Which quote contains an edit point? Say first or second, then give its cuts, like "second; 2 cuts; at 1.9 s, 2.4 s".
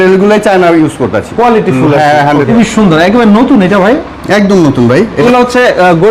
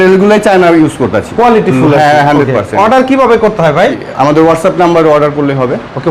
first; 2 cuts; at 2.5 s, 5.2 s